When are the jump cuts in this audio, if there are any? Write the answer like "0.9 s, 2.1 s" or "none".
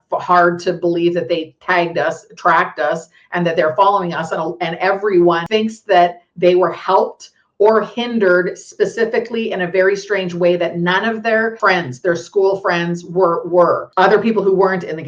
5.4 s, 11.6 s, 13.9 s